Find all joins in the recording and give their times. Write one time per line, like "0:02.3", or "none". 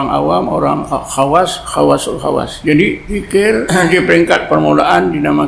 0:01.0
0:02.5
0:03.5